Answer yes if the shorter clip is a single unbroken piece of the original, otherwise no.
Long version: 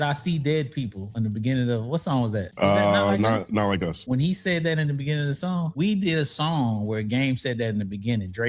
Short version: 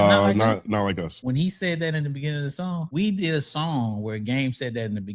yes